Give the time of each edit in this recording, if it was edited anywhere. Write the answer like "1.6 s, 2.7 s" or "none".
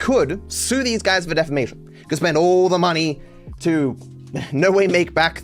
none